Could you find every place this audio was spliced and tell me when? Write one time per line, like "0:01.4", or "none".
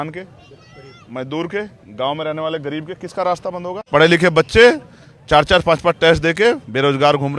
0:03.7